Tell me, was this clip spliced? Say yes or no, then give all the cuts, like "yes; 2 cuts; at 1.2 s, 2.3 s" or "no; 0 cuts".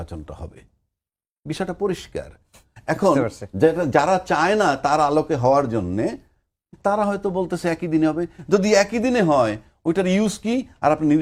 no; 0 cuts